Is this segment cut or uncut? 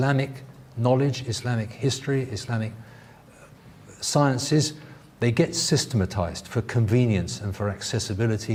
uncut